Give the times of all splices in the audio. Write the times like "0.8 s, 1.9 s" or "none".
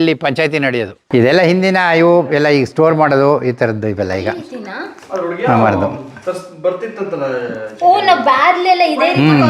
1.0 s